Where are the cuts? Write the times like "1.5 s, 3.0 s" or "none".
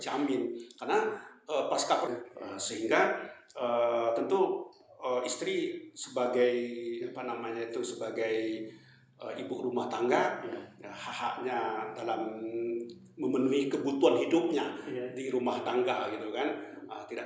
2.1 s